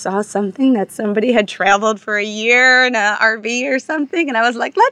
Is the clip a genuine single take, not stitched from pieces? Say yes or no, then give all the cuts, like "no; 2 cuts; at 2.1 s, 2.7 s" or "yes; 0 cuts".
yes; 0 cuts